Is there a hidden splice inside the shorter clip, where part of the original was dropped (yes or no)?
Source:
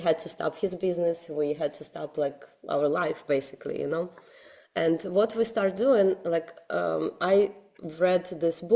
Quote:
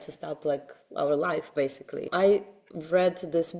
yes